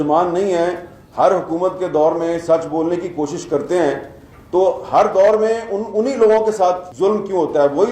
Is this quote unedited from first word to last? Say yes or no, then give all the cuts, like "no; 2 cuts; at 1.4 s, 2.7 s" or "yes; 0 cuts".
no; 1 cut; at 6.9 s